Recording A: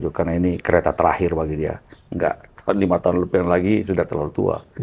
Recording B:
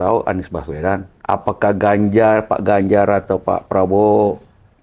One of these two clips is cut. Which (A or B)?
B